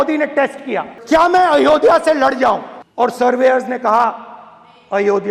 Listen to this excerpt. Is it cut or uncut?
cut